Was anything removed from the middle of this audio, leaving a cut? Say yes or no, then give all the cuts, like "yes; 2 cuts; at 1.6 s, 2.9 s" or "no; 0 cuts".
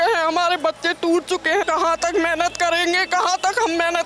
yes; 1 cut; at 1.6 s